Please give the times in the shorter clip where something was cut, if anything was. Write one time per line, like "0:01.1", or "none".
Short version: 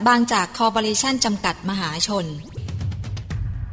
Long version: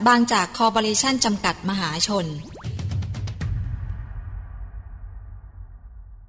0:02.6